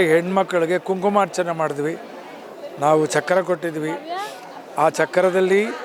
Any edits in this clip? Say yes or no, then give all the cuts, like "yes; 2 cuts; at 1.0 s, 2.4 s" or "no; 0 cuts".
no; 0 cuts